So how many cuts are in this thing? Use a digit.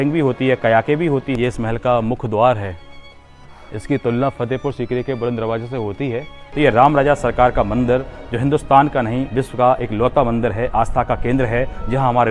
2